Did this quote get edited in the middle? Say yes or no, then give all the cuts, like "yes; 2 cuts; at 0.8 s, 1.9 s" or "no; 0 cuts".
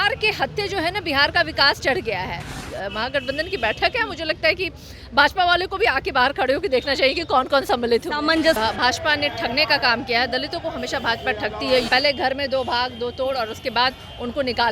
yes; 3 cuts; at 2.6 s, 8.6 s, 11.9 s